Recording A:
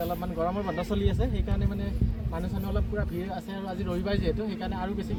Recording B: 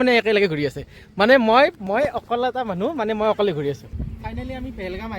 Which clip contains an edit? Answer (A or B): B